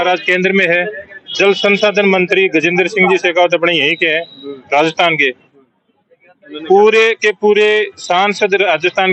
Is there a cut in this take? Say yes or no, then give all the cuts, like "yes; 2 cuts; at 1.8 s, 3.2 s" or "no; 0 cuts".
no; 0 cuts